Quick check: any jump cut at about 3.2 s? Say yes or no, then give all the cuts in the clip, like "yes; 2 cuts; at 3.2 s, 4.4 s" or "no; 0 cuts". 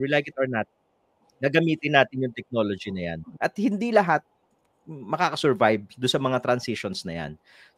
yes; 1 cut; at 3.2 s